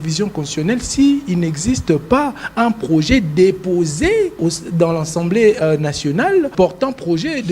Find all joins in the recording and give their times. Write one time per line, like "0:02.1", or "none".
0:04.3
0:06.5